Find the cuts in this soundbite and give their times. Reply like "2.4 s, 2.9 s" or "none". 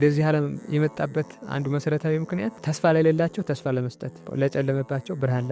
none